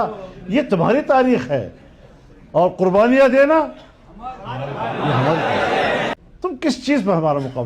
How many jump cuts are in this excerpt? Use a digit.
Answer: 1